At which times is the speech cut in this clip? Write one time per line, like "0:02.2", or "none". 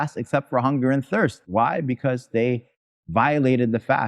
0:01.4